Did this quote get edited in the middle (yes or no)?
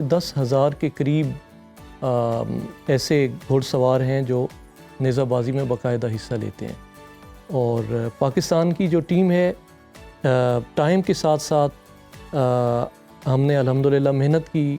no